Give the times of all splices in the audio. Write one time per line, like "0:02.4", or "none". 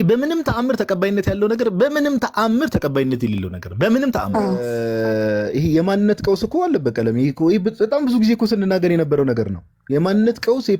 0:04.7